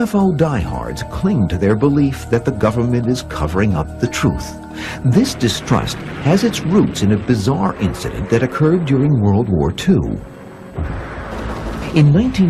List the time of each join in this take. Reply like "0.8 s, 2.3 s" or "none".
7.4 s